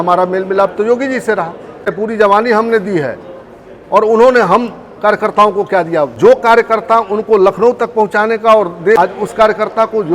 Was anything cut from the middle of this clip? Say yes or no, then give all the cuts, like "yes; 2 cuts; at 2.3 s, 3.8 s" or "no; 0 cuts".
yes; 3 cuts; at 2.0 s, 6.3 s, 9.0 s